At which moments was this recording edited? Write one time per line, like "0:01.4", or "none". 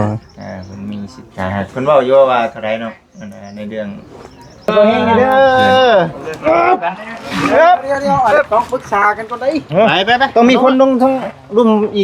0:04.7